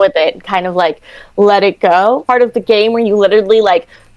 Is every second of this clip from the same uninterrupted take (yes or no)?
no